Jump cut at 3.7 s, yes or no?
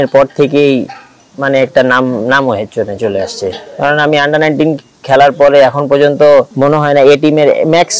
no